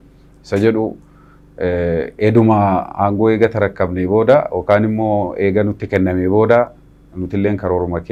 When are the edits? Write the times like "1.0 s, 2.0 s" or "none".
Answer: none

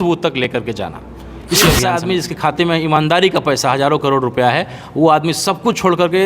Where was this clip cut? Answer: 1.9 s

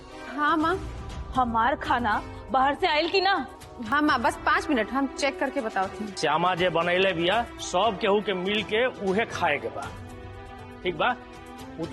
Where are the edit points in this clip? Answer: 3.8 s, 6.0 s

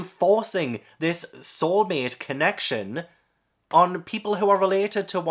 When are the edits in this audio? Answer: none

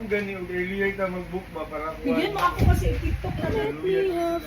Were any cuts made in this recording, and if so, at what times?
3.5 s

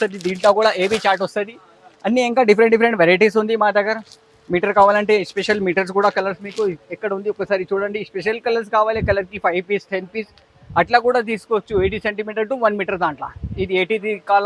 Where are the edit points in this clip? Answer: none

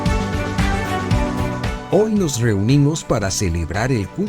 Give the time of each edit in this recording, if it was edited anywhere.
1.8 s

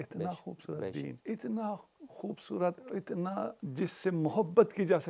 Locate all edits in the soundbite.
1.2 s, 3.6 s

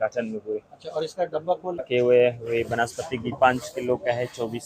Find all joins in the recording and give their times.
1.9 s

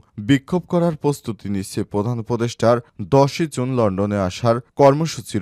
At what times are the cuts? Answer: none

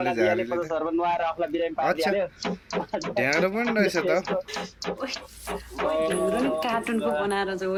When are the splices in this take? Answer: none

